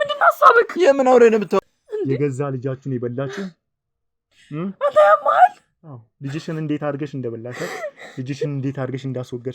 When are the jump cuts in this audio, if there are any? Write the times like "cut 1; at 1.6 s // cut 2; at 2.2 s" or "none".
cut 1; at 1.6 s